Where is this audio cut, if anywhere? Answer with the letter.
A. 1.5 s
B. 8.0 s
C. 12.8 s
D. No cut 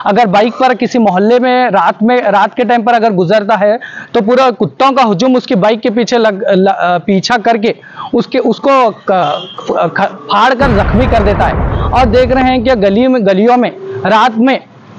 D